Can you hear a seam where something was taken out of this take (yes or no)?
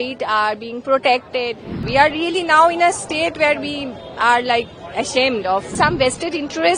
yes